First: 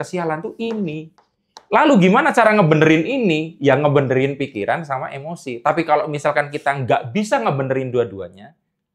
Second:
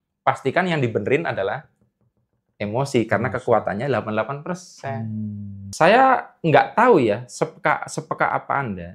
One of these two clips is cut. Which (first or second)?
second